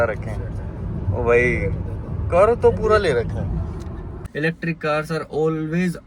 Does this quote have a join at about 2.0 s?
no; 1 cut; at 4.2 s

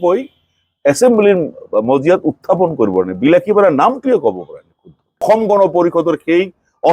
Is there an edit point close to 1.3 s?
no; 1 cut; at 5.2 s

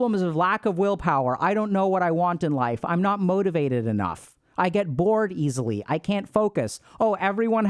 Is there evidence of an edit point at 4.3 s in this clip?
no; 0 cuts

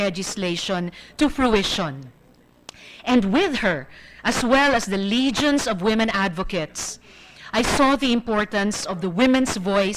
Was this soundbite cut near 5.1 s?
yes; 1 cut; at 5.1 s

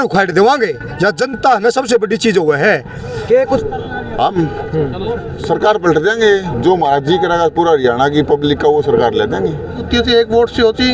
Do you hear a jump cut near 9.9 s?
yes; 2 cuts; at 3.6 s, 9.9 s

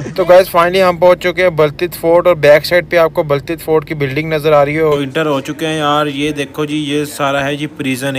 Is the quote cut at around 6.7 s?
no; 1 cut; at 5.0 s

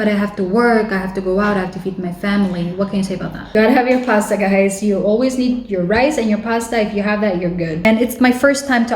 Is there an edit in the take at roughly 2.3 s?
no; 2 cuts; at 3.5 s, 7.8 s

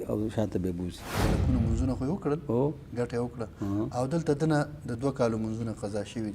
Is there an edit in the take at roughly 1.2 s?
yes; 1 cut; at 1.2 s

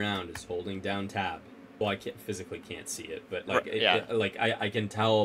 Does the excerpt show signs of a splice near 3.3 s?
no; 1 cut; at 1.8 s

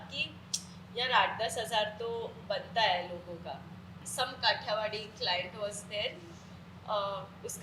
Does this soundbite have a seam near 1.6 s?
no; 1 cut; at 4.0 s

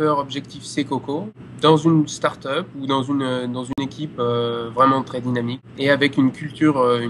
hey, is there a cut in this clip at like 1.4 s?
yes; 2 cuts; at 1.4 s, 5.6 s

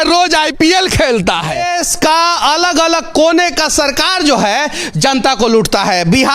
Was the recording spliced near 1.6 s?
yes; 1 cut; at 1.6 s

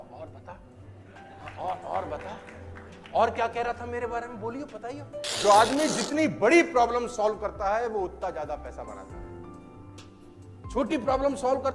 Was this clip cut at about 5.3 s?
yes; 1 cut; at 5.3 s

